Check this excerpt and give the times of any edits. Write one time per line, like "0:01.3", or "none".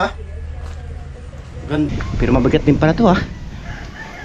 0:01.9